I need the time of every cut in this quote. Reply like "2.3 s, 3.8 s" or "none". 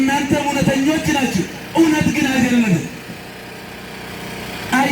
none